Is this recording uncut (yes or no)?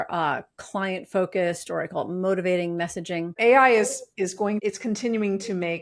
no